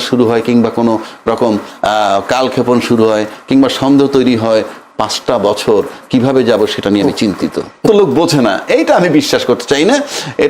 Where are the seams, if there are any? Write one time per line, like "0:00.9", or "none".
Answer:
0:07.8